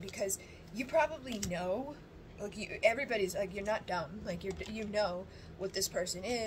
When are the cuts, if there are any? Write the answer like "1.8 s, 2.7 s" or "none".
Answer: none